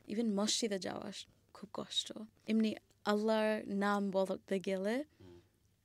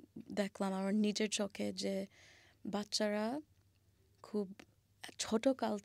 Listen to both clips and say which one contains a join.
first; 1 cut; at 2.3 s

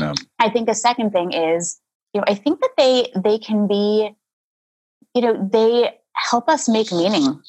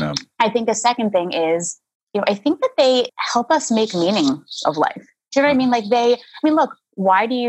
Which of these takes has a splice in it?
second; 1 cut; at 3.1 s

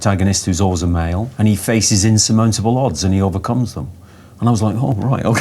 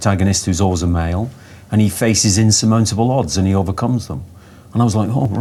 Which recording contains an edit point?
first; 1 cut; at 1.3 s

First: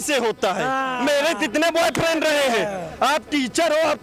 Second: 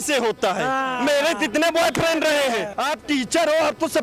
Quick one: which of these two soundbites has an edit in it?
second; 1 cut; at 2.7 s

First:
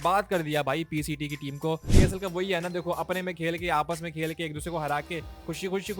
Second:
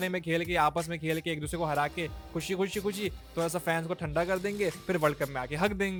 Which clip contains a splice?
first; 1 cut; at 1.9 s

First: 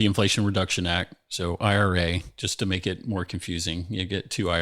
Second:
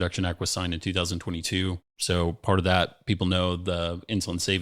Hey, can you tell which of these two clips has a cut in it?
second; 1 cut; at 1.9 s

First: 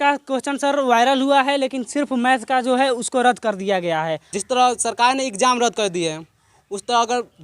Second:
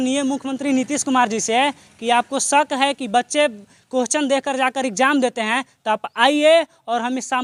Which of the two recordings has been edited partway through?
first; 1 cut; at 4.3 s

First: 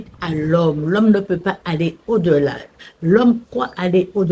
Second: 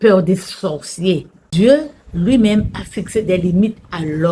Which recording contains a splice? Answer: second; 1 cut; at 1.4 s

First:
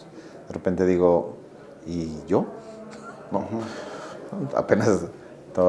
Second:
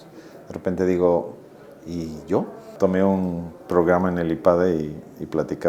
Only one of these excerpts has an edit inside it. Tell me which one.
second; 1 cut; at 2.7 s

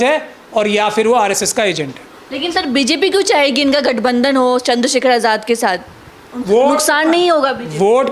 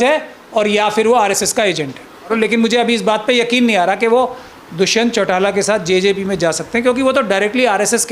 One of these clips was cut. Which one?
second; 1 cut; at 2.3 s

